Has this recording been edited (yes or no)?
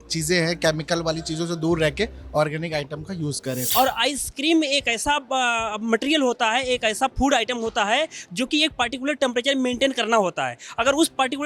yes